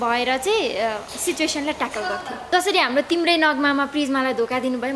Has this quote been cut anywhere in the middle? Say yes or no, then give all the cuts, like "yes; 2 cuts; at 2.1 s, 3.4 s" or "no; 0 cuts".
yes; 1 cut; at 2.4 s